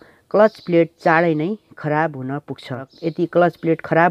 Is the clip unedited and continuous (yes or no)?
no